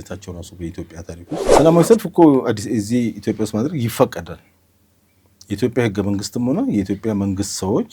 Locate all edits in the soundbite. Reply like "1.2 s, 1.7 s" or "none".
1.5 s